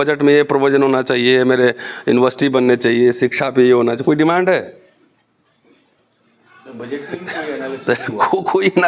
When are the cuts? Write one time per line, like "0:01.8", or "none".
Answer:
none

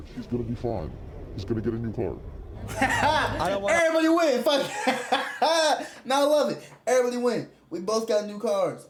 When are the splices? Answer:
none

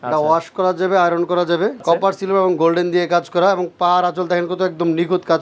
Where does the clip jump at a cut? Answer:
0:01.8

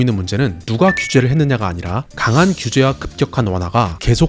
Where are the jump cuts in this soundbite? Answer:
none

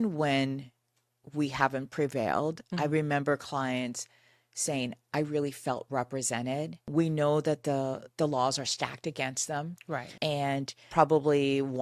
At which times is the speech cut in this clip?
0:10.8

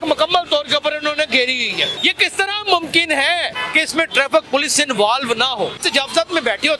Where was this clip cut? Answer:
0:01.9
0:03.6
0:05.8

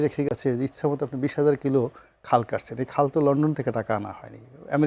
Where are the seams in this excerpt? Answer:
none

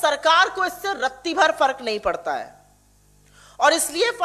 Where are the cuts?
none

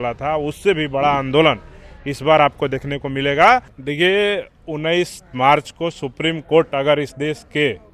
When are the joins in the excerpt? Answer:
0:03.8

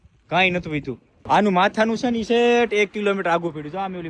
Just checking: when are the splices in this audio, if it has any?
0:01.1

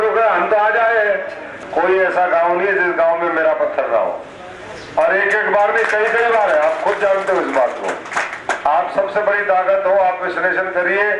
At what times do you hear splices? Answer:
0:01.5
0:08.4

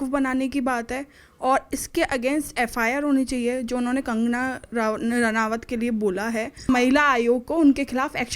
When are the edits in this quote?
0:06.6

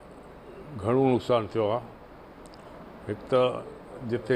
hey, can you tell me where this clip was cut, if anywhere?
none

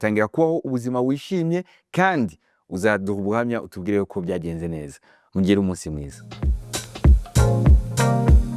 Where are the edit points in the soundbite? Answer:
none

